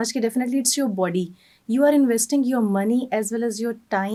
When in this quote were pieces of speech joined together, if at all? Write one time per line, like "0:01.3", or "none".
none